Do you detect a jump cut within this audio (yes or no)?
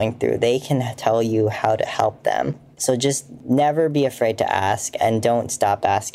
yes